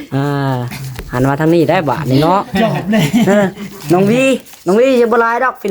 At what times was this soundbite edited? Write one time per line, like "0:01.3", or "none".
none

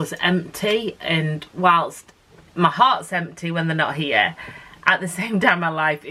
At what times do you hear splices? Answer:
none

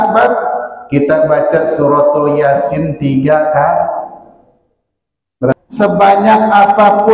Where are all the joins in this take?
0:05.5

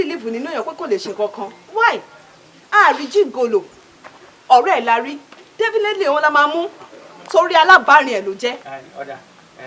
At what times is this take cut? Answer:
none

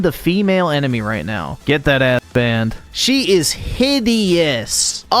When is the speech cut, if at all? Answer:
0:01.5
0:02.8

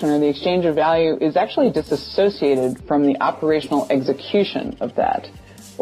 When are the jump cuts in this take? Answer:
none

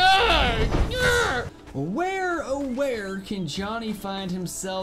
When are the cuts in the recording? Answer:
0:01.6

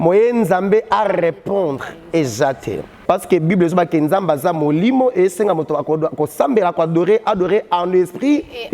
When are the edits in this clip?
0:02.9

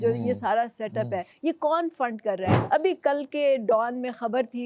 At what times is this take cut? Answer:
0:01.3
0:02.6

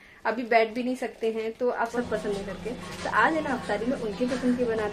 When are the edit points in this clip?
0:01.9

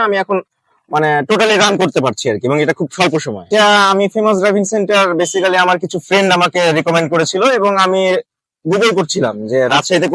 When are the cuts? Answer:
0:03.5

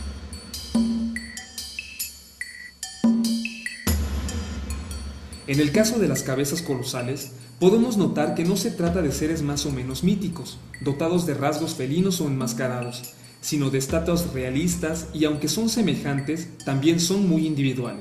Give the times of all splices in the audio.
0:14.0

